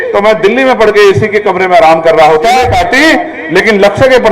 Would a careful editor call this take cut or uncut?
cut